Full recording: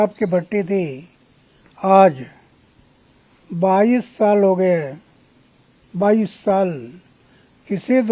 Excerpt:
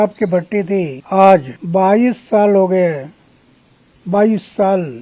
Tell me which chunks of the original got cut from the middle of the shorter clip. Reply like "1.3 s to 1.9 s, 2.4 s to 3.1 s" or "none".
1.0 s to 1.7 s, 2.3 s to 3.4 s